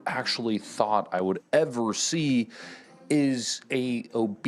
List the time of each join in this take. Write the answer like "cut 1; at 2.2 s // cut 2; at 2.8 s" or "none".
none